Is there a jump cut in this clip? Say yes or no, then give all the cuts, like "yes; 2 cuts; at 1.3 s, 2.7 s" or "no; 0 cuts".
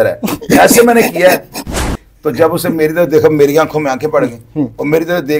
yes; 1 cut; at 1.7 s